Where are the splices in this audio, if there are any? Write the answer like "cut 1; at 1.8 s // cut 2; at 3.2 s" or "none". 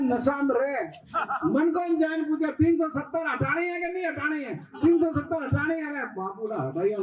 none

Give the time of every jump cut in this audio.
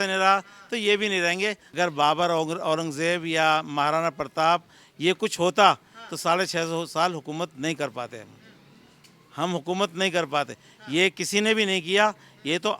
cut 1; at 1.6 s

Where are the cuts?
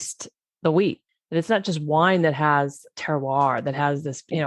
cut 1; at 1.0 s

